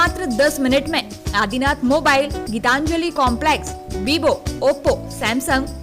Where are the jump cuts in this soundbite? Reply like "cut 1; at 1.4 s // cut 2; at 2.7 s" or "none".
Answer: none